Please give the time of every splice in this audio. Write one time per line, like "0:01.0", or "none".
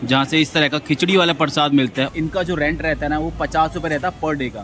0:02.1